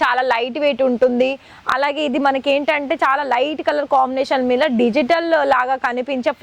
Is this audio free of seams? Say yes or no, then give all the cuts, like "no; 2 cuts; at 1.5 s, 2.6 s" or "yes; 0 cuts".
yes; 0 cuts